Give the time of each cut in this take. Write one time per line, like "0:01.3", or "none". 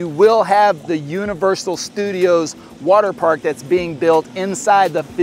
none